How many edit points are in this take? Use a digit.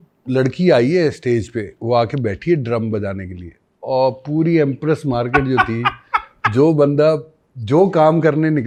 0